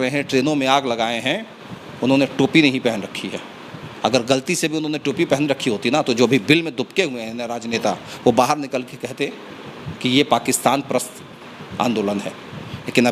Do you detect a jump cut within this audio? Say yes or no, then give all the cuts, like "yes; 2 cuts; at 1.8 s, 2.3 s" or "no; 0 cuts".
no; 0 cuts